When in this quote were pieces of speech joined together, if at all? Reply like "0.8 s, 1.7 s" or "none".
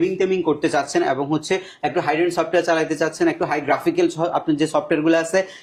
none